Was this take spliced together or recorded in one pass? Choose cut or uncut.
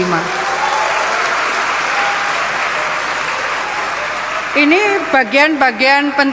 uncut